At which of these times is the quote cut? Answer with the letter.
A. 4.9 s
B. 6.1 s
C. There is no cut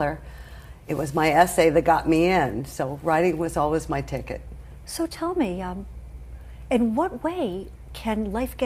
A